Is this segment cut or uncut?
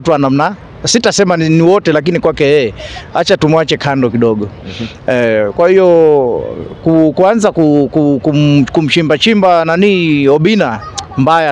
uncut